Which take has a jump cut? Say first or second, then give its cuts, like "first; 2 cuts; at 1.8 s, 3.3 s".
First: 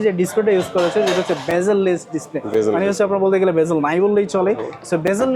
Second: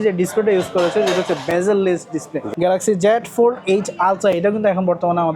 second; 1 cut; at 2.4 s